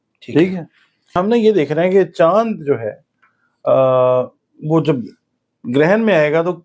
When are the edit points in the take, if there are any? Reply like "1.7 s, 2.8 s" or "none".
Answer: 1.1 s